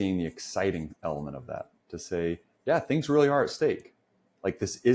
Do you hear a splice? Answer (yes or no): no